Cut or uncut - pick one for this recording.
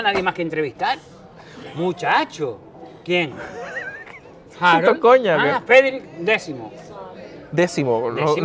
uncut